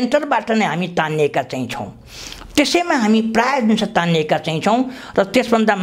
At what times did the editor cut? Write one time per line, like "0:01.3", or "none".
none